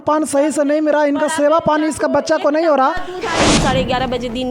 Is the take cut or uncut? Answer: cut